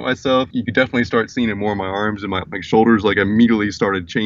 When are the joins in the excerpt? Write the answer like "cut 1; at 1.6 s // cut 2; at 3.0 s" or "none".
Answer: none